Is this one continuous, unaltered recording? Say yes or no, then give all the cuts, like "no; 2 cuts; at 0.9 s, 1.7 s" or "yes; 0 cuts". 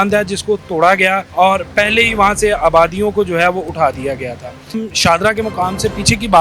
no; 2 cuts; at 1.3 s, 4.8 s